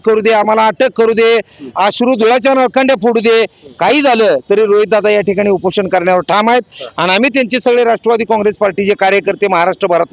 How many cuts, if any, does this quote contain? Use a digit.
0